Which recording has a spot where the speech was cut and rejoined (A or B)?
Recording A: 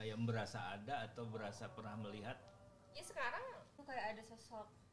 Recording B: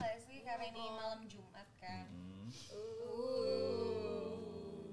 A